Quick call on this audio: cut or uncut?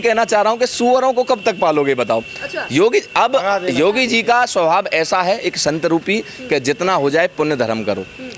uncut